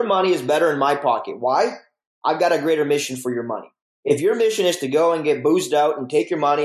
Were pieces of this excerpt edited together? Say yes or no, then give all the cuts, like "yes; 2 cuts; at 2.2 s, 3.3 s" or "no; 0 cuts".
no; 0 cuts